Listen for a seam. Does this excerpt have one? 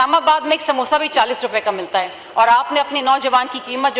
no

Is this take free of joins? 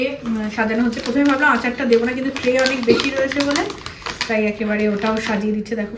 yes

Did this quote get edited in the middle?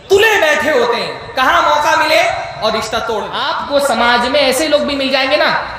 yes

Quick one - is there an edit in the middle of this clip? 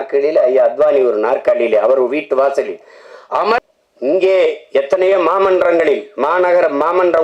yes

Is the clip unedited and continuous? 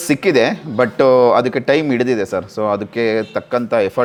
yes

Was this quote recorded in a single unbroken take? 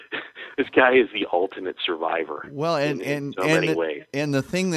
yes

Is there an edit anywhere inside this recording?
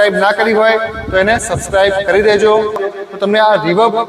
yes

